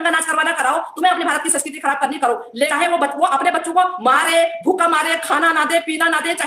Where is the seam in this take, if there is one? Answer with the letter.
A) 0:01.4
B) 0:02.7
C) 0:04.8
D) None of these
B